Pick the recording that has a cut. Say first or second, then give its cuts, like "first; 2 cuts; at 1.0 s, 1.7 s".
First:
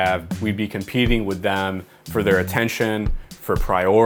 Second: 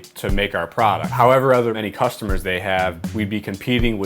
second; 2 cuts; at 1.1 s, 1.8 s